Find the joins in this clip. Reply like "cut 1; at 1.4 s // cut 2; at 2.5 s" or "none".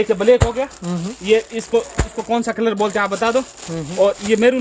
none